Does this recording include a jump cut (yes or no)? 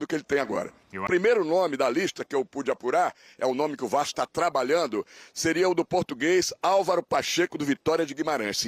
yes